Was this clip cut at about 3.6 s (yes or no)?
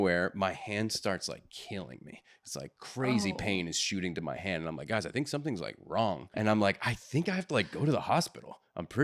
no